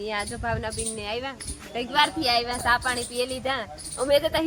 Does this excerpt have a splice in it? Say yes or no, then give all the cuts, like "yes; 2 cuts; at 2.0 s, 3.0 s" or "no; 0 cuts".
no; 0 cuts